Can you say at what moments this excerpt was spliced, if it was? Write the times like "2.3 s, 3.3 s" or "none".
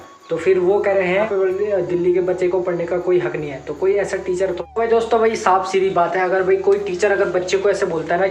1.5 s, 4.6 s